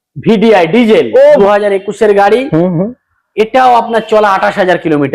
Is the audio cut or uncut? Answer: cut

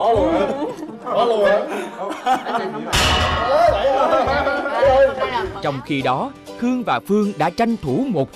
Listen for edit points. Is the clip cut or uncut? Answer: cut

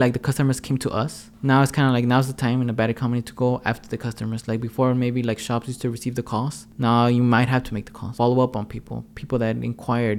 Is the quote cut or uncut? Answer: cut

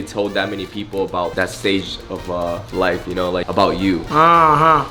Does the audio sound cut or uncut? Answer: uncut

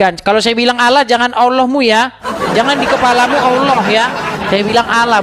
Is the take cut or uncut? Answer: uncut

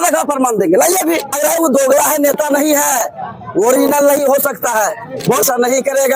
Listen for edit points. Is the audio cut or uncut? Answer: cut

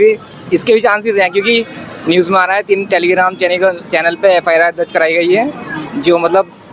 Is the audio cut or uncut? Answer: uncut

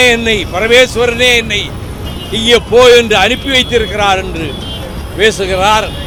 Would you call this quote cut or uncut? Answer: uncut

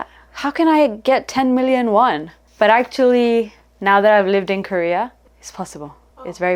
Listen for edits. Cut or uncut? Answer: uncut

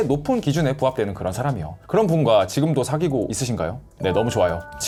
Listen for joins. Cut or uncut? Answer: uncut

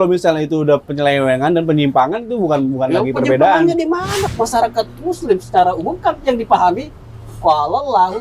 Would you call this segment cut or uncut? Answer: cut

